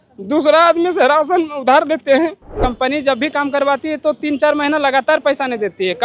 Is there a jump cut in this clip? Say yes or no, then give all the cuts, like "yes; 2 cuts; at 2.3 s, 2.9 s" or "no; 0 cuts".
yes; 1 cut; at 2.6 s